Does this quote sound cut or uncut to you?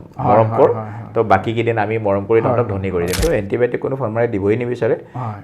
cut